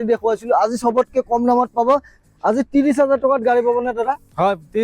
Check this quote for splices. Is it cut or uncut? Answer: cut